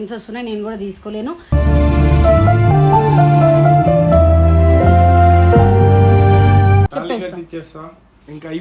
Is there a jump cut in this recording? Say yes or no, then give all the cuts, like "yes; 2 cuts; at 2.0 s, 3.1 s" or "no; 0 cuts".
yes; 1 cut; at 6.9 s